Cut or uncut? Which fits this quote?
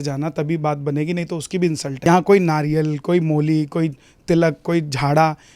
cut